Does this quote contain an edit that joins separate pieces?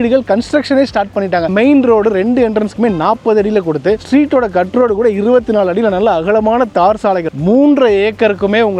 yes; 3 cuts; at 1.5 s, 4.0 s, 7.3 s

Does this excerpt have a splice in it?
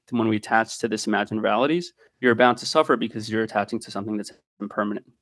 yes; 1 cut; at 2.0 s

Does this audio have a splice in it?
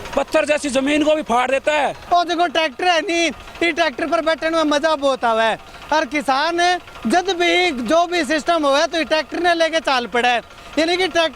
yes; 1 cut; at 2.0 s

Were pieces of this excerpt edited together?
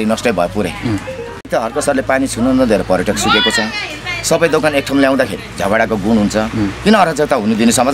yes; 1 cut; at 1.5 s

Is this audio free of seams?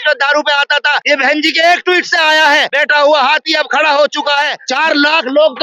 no; 3 cuts; at 1.0 s, 2.7 s, 4.6 s

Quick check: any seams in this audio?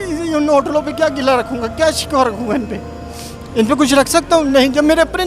no; 0 cuts

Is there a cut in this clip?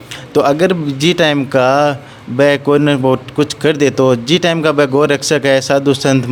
no; 0 cuts

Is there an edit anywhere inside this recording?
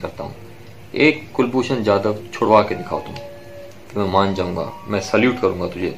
no; 0 cuts

